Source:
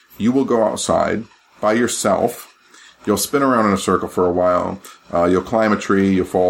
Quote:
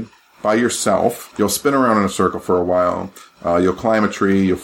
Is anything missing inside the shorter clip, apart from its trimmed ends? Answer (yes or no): yes